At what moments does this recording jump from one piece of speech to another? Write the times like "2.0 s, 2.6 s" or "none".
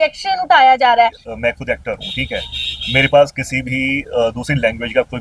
1.3 s